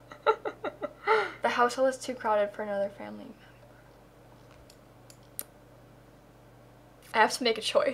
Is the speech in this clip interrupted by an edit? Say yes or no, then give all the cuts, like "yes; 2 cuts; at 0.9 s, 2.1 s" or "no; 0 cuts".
yes; 1 cut; at 7.0 s